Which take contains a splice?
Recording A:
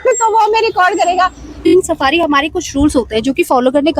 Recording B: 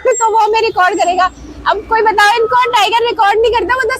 A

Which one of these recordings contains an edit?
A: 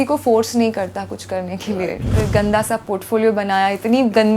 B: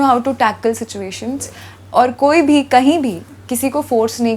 A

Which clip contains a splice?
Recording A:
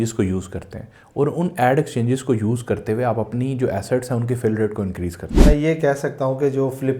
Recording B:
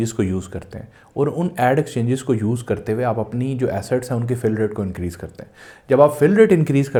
A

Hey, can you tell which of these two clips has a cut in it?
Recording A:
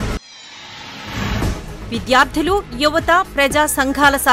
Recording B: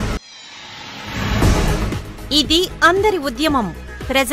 A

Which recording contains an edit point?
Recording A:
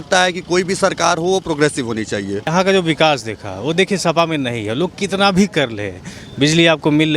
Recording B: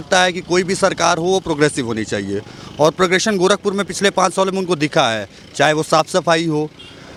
A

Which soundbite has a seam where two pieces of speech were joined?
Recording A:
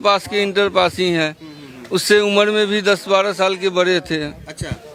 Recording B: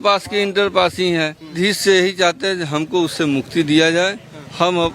B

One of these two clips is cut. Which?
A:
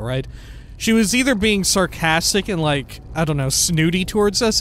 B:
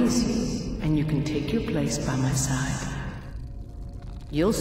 A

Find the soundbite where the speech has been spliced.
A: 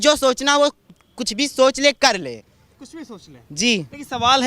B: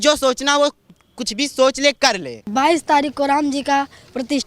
B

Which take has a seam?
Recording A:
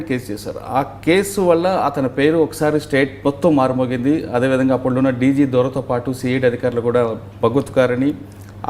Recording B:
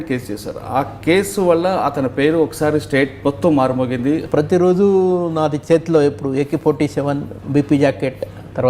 B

